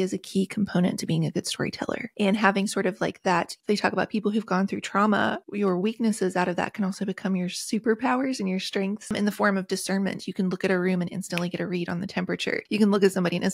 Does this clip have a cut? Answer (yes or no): yes